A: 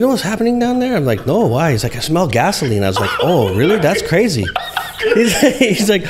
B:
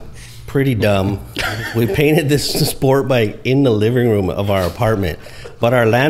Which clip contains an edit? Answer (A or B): A